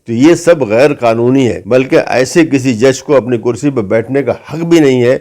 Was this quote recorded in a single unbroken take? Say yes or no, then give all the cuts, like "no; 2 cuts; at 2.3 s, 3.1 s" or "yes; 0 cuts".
no; 1 cut; at 1.6 s